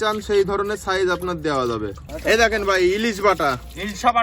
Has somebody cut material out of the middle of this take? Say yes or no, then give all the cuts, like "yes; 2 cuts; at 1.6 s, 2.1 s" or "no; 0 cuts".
yes; 1 cut; at 2.1 s